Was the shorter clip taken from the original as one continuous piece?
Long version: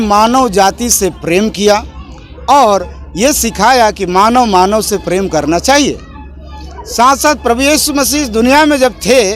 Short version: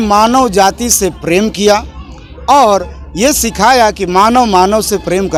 yes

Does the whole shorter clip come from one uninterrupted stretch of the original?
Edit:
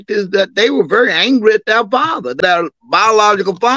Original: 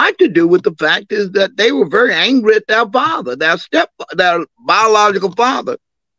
no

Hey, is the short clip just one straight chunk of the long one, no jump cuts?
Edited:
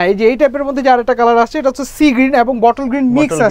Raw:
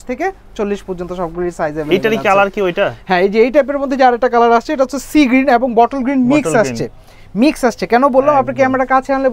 yes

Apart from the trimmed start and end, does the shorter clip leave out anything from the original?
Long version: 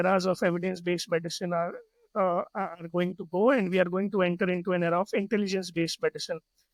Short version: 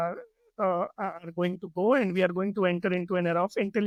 no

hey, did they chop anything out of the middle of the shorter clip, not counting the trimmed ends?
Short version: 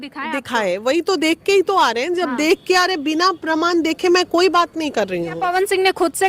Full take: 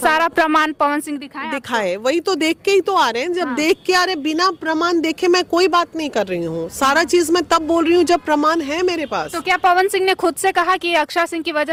yes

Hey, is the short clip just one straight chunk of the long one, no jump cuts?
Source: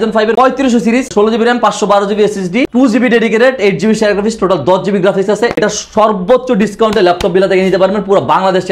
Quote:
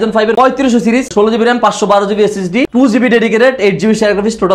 yes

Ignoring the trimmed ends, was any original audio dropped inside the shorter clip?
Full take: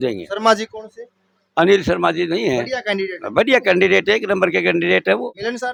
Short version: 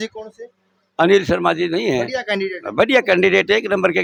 no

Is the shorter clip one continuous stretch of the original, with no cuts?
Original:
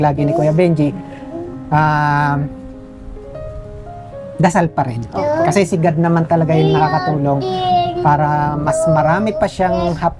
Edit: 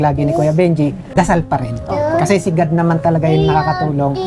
no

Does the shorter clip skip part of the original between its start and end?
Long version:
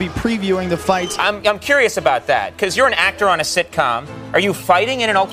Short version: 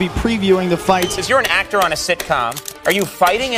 yes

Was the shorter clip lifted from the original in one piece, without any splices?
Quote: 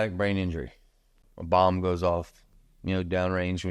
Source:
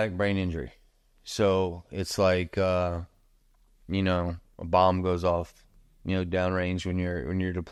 no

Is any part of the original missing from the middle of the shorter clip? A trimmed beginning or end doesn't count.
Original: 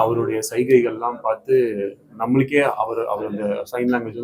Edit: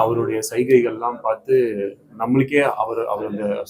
no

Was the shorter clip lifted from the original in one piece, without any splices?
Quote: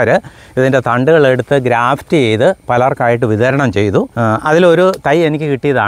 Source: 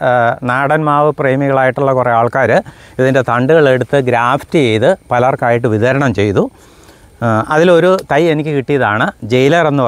no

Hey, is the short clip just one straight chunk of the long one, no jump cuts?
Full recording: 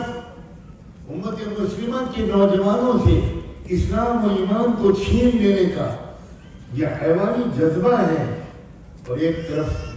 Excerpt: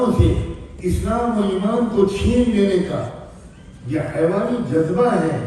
yes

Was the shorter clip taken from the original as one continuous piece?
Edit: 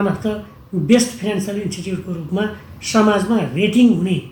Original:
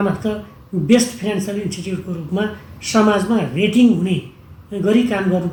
yes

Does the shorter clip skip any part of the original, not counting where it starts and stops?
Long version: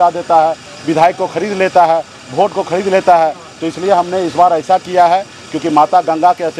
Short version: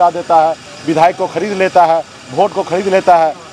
no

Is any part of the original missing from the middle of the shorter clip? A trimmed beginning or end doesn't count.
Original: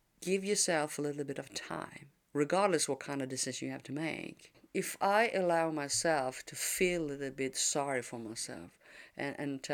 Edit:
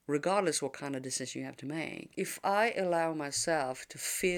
yes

